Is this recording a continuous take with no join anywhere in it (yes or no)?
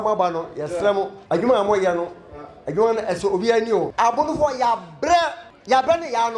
no